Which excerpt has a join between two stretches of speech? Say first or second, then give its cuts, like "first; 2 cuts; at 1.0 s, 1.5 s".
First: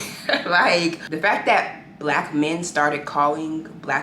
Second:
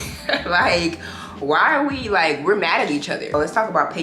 first; 1 cut; at 1.1 s